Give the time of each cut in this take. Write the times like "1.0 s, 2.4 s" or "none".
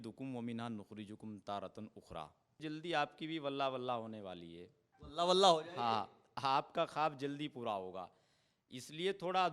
2.6 s